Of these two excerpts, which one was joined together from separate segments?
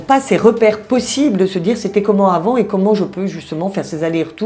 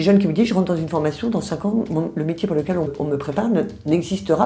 second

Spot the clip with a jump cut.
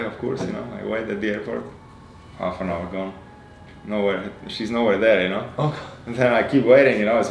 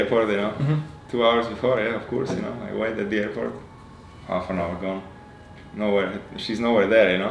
second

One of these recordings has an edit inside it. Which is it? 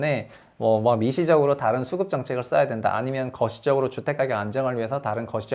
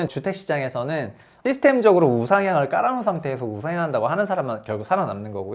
second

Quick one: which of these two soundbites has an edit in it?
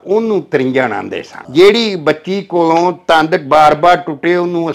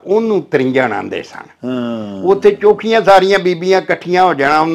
first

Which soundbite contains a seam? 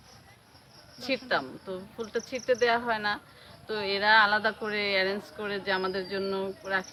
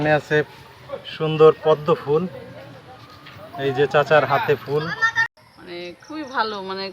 second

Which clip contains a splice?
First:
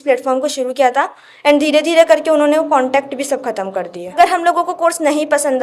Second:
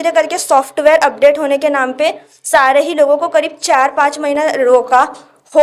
first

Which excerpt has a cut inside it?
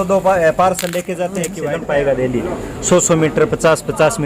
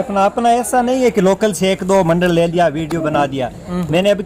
first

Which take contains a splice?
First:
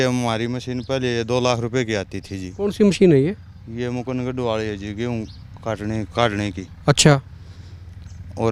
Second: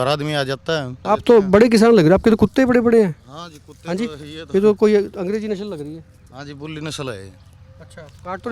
second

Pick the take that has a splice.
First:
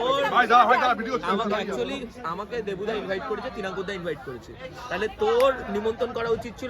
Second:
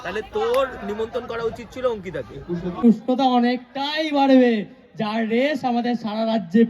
second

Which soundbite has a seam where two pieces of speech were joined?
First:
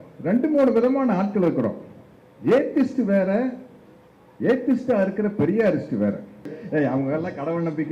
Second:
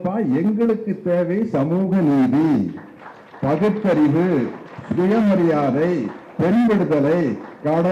first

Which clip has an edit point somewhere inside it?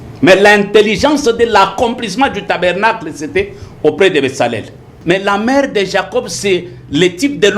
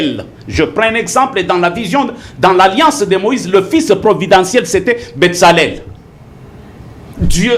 first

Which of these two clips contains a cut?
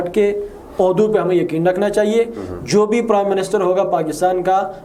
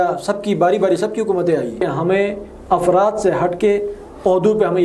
second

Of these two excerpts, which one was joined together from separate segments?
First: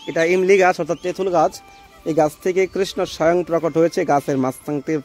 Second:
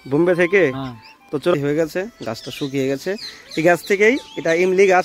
second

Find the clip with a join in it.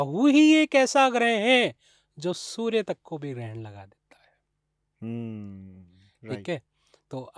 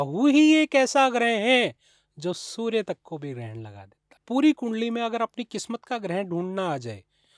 second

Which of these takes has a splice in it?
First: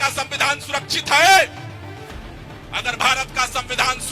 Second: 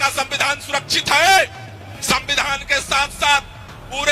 second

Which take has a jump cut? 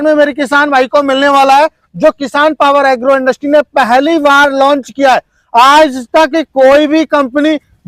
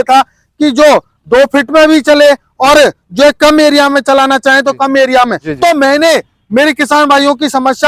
second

